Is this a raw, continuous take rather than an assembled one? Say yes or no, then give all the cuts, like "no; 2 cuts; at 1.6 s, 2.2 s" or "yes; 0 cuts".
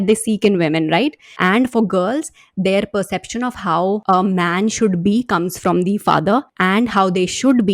no; 3 cuts; at 1.2 s, 4.0 s, 6.5 s